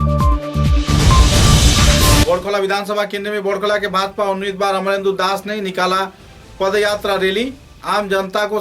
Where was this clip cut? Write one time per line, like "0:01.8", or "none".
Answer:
0:02.2